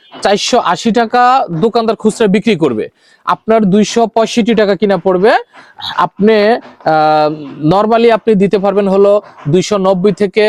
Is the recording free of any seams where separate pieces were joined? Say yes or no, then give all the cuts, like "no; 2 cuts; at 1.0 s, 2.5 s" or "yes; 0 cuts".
yes; 0 cuts